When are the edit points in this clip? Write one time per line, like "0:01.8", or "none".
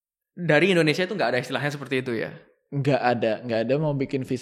none